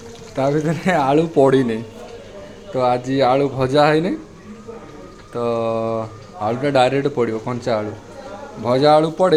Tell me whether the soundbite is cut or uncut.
uncut